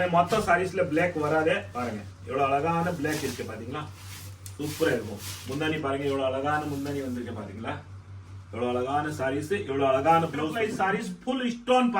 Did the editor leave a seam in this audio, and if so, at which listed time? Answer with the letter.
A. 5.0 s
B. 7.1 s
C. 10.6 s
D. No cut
C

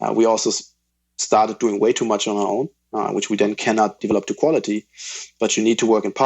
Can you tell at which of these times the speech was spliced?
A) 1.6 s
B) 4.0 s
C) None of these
B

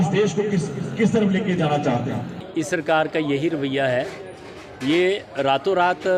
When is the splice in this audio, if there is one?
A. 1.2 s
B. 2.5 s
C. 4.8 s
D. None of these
B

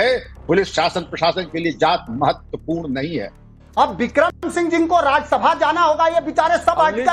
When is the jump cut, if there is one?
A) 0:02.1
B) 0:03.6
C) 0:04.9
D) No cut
B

